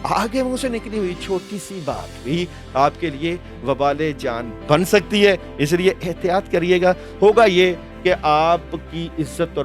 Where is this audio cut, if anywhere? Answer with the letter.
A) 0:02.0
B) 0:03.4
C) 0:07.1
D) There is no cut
C